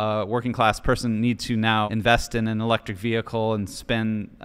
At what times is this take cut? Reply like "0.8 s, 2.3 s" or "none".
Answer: 1.9 s